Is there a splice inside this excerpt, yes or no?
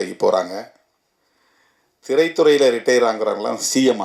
no